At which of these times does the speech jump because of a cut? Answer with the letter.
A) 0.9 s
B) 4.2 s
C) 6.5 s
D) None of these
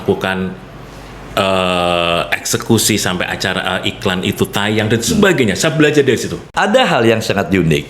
C